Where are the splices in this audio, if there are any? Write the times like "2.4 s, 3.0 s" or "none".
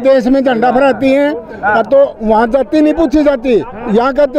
none